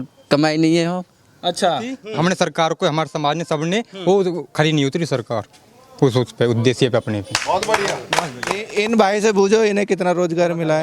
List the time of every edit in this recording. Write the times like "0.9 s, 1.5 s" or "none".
1.9 s, 8.7 s